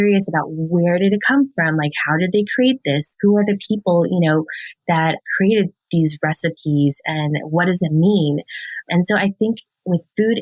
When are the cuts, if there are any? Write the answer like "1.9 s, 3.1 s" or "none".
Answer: none

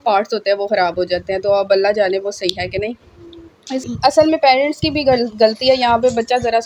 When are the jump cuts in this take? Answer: 3.8 s

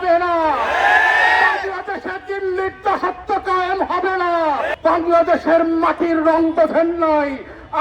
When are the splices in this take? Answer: 4.7 s

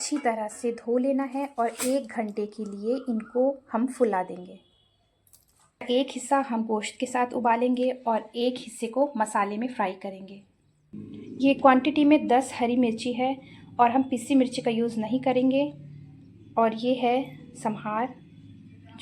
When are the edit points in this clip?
5.8 s

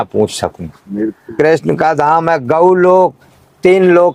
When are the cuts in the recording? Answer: 1.3 s

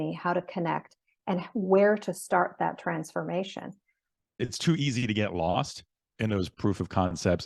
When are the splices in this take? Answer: 4.4 s

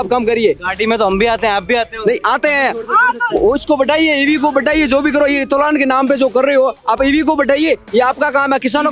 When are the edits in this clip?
none

